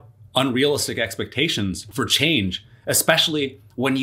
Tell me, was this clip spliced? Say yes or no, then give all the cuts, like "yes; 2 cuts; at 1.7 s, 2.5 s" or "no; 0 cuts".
yes; 1 cut; at 1.8 s